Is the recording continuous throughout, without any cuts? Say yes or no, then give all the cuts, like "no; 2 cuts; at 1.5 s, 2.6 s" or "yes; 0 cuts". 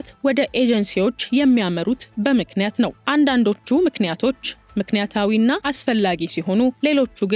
yes; 0 cuts